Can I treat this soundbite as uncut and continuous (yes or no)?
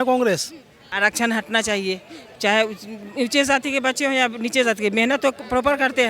no